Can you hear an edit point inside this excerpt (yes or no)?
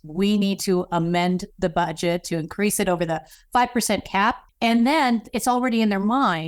yes